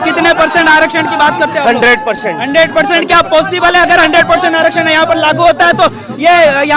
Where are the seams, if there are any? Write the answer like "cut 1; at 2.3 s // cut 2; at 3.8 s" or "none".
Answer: none